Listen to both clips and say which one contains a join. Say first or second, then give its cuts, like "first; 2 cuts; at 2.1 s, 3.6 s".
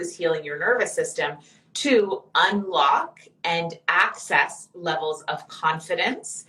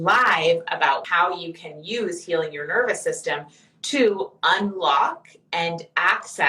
second; 1 cut; at 1.0 s